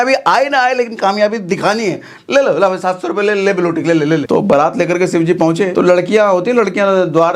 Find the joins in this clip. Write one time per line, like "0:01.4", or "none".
0:04.2
0:05.7